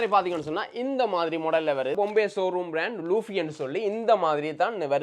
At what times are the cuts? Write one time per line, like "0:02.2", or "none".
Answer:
0:01.9